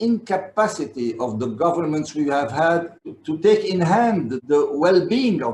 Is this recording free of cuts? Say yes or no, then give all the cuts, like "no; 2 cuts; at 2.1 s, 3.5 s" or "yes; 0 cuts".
no; 1 cut; at 3.0 s